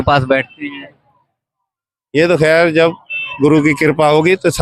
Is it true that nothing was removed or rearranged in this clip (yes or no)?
yes